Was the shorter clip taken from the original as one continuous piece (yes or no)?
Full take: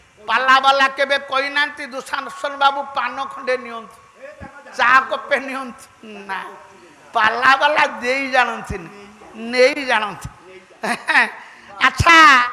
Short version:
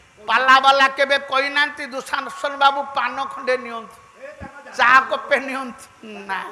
yes